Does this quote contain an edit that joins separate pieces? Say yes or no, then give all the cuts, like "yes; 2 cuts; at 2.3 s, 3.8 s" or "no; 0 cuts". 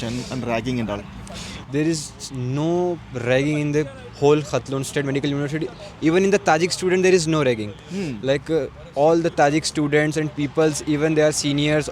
no; 0 cuts